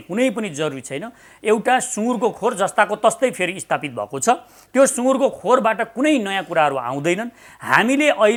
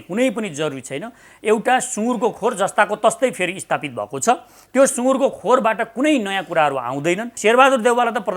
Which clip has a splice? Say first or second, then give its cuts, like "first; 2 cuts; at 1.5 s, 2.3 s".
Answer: second; 1 cut; at 7.3 s